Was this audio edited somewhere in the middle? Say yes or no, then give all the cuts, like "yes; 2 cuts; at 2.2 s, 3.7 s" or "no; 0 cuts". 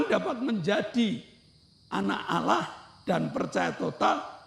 no; 0 cuts